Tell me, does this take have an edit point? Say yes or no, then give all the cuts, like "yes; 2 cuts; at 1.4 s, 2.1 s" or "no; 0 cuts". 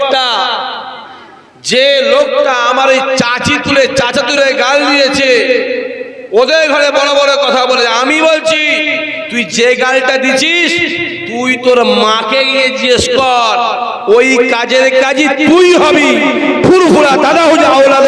no; 0 cuts